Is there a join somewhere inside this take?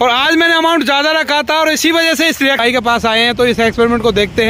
yes; 1 cut; at 2.6 s

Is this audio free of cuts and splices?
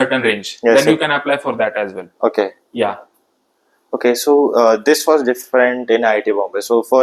yes; 0 cuts

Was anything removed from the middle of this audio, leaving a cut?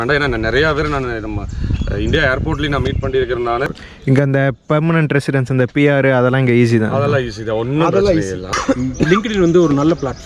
yes; 2 cuts; at 3.6 s, 8.5 s

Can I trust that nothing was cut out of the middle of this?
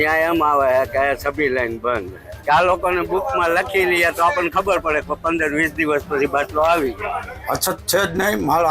no; 2 cuts; at 2.2 s, 7.3 s

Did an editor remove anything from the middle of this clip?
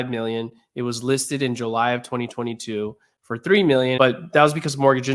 yes; 1 cut; at 4.0 s

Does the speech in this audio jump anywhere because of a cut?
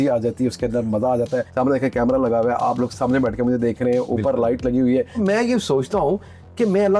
yes; 2 cuts; at 1.5 s, 5.2 s

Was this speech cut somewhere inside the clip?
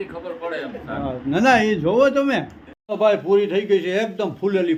no; 0 cuts

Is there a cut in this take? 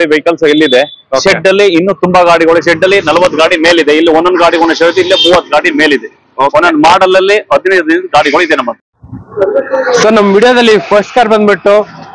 yes; 1 cut; at 8.9 s

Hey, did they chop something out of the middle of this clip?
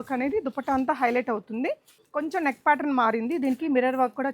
yes; 1 cut; at 1.9 s

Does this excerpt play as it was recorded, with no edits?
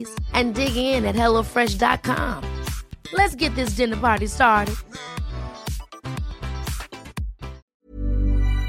no; 1 cut; at 7.6 s

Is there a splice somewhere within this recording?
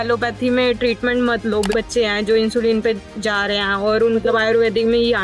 yes; 2 cuts; at 1.7 s, 4.2 s

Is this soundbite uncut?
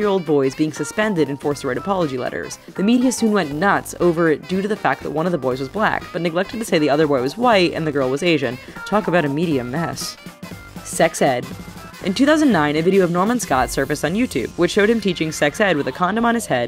yes; 0 cuts

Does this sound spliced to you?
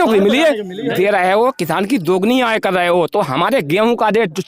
yes; 1 cut; at 0.9 s

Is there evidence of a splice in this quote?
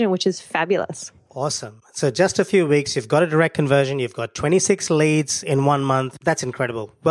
yes; 1 cut; at 6.1 s

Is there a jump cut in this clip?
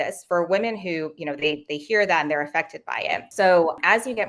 no; 0 cuts

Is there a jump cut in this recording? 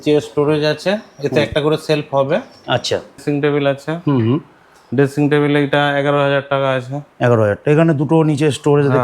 yes; 1 cut; at 3.2 s

